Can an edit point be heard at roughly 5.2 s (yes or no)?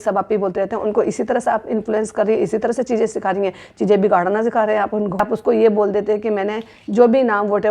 yes